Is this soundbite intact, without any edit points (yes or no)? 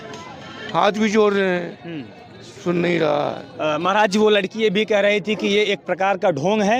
yes